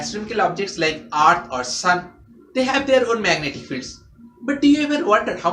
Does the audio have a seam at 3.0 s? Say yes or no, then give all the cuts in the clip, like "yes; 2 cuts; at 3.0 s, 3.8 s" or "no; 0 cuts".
no; 1 cut; at 1.8 s